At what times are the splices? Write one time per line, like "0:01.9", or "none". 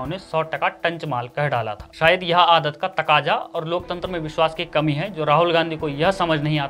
0:01.8